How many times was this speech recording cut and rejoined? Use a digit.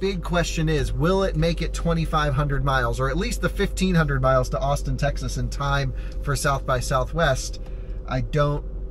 0